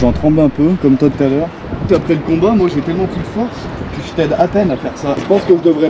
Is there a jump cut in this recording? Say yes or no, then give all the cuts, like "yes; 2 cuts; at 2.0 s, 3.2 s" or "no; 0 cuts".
yes; 2 cuts; at 1.9 s, 5.2 s